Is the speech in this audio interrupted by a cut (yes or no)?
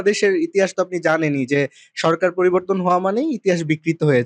no